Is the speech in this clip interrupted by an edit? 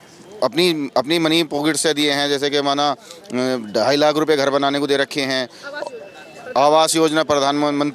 no; 0 cuts

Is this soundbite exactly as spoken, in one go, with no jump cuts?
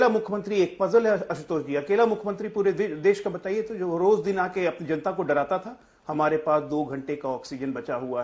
yes; 0 cuts

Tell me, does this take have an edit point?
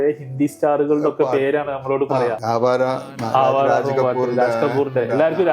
yes; 1 cut; at 2.4 s

